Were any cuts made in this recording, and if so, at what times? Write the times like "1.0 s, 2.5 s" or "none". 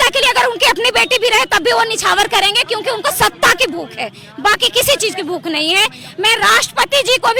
none